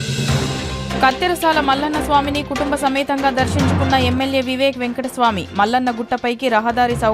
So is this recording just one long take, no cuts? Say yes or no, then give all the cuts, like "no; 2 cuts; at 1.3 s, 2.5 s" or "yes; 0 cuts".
no; 1 cut; at 1.0 s